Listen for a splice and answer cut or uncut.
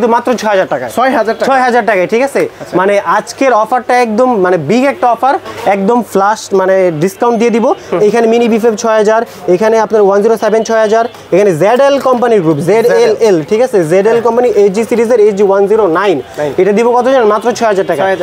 uncut